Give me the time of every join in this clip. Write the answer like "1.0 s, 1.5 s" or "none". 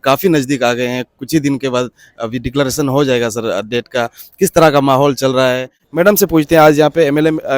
5.8 s

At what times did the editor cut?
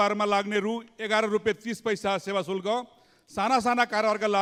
none

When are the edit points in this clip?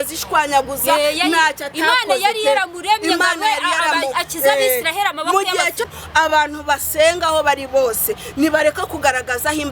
5.9 s

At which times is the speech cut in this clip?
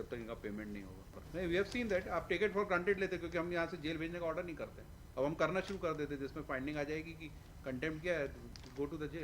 1.2 s

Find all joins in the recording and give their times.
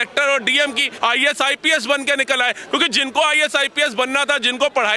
0.9 s

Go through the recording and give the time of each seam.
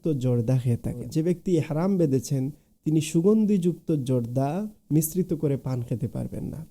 1.1 s

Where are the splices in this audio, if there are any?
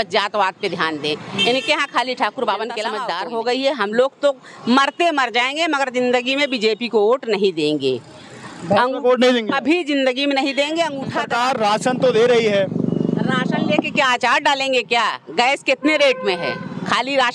3.0 s, 11.2 s

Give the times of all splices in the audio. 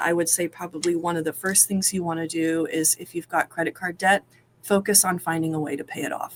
none

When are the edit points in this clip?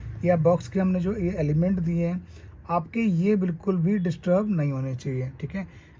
none

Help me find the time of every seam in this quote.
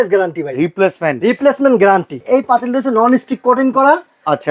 2.2 s

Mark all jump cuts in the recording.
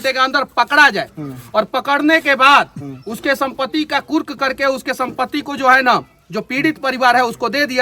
none

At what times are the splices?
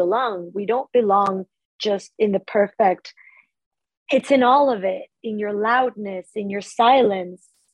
3.3 s

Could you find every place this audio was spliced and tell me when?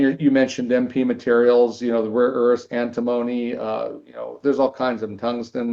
none

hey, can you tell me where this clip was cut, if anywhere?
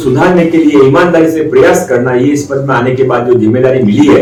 none

